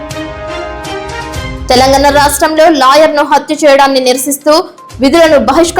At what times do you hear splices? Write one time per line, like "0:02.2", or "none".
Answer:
0:01.6